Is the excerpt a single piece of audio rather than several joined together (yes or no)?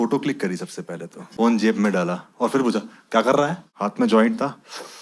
no